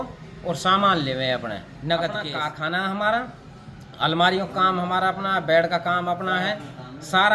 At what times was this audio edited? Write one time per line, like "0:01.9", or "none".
0:02.4